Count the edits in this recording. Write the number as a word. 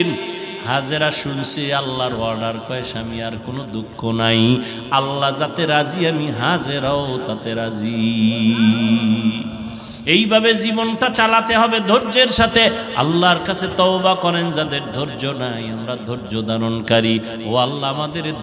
zero